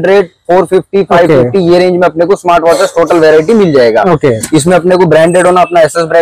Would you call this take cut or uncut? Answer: uncut